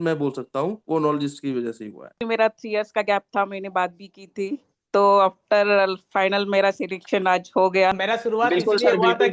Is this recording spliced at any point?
yes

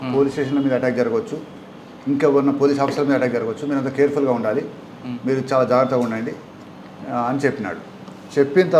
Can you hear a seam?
no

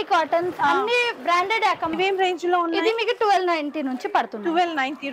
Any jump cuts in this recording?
yes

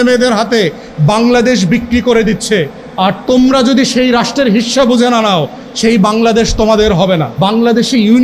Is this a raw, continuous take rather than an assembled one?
no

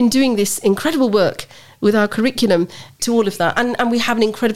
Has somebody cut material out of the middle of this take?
yes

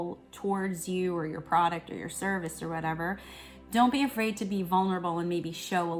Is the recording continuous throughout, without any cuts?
yes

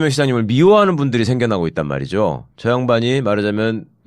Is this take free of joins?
no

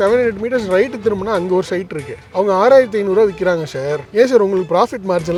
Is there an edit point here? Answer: no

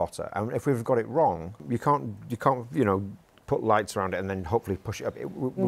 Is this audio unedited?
no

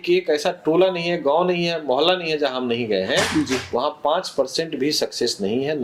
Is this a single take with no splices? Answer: yes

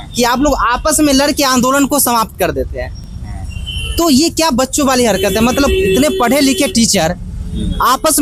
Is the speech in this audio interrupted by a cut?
no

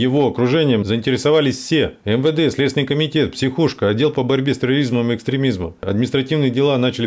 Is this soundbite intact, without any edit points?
no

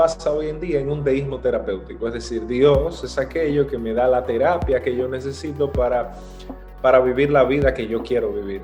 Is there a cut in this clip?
no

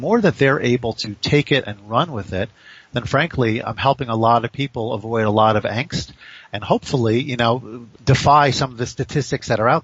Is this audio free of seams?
no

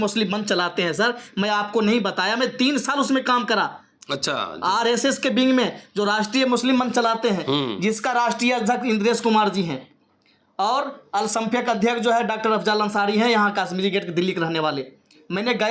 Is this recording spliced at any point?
no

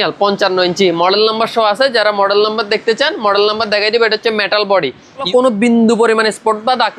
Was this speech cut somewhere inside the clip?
yes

